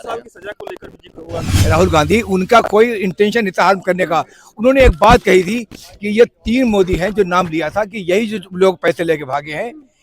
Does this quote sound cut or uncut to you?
cut